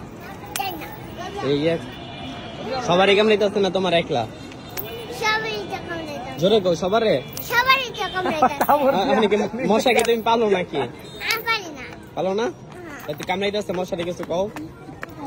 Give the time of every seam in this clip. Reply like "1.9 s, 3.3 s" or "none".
none

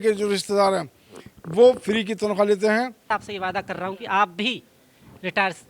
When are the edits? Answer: 3.2 s

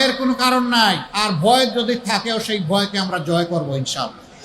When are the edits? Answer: 1.1 s

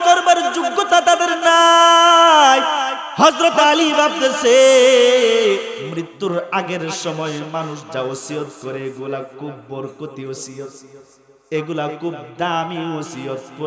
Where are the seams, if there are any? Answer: 3.0 s, 5.8 s

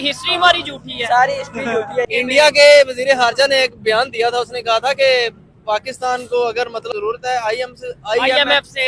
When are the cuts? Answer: 2.0 s, 6.9 s

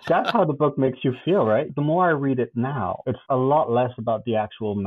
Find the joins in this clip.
1.7 s, 3.1 s

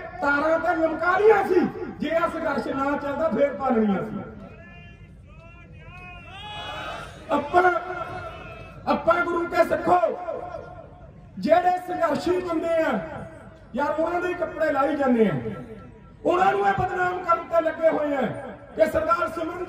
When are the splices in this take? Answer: none

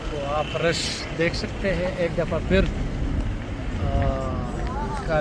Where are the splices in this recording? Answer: none

